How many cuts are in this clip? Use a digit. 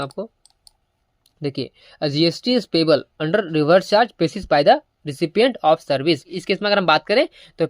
1